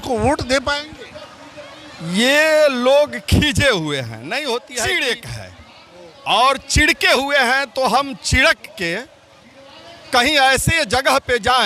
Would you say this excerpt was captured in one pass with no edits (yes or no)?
no